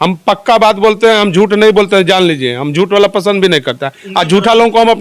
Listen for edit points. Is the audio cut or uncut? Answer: uncut